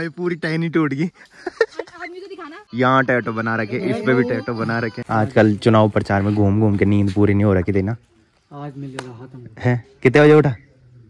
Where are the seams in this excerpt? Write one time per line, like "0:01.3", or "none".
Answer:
0:02.6
0:04.9